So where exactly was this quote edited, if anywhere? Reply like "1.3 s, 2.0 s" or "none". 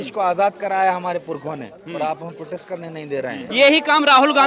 3.4 s